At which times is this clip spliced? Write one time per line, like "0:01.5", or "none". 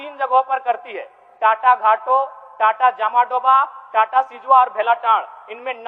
none